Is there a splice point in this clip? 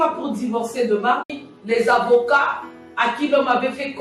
yes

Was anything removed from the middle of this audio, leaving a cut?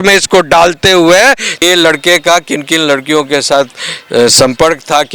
yes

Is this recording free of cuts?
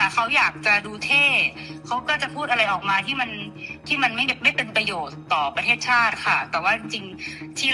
yes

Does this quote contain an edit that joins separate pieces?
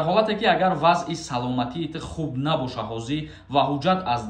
no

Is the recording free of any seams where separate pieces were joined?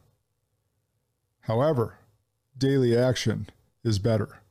yes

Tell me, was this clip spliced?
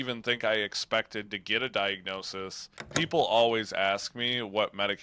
yes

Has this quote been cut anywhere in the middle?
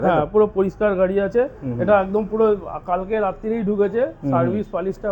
no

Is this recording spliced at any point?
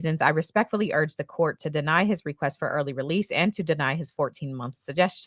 no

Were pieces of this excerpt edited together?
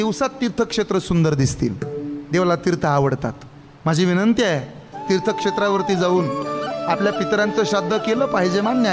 no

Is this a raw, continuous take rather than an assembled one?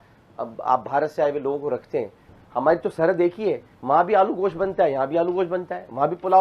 no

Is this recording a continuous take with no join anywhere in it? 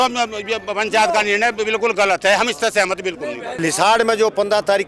no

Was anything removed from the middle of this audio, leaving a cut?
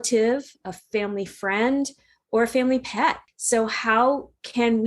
yes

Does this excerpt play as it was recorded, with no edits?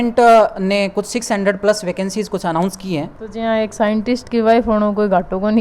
no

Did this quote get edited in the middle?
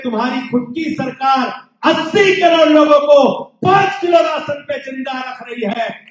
no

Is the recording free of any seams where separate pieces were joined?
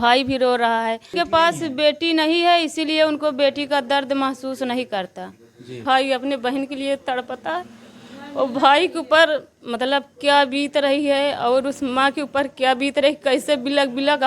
no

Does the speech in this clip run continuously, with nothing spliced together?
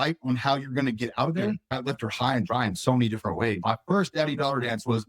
no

